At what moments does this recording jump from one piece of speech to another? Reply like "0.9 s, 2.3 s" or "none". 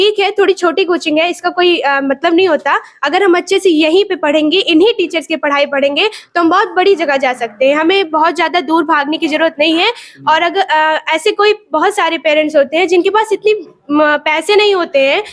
none